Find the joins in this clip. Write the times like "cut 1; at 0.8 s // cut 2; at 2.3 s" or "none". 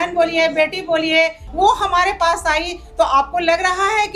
cut 1; at 1.4 s